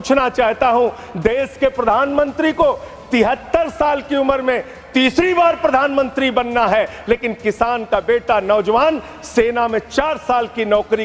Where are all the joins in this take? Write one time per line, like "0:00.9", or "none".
none